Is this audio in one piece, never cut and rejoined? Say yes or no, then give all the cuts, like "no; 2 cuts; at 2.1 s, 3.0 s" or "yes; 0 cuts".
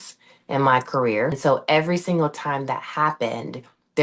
no; 1 cut; at 1.4 s